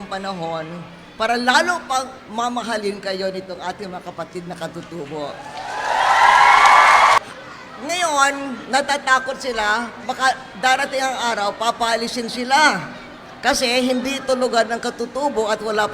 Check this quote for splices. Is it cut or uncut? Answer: cut